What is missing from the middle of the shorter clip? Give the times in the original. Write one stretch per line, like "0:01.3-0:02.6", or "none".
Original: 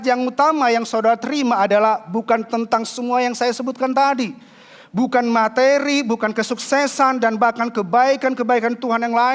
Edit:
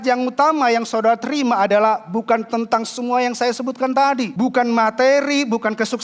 0:04.3-0:04.9